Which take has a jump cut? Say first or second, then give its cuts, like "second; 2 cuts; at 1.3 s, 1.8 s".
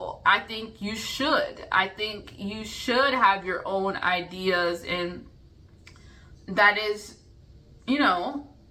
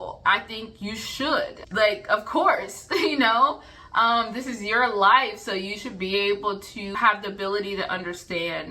second; 2 cuts; at 1.6 s, 6.9 s